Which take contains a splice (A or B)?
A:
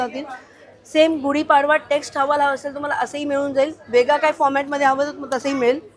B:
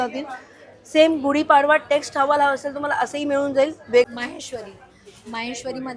B